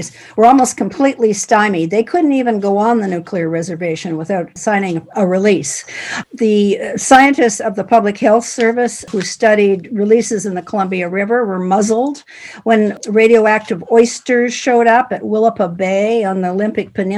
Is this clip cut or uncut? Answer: uncut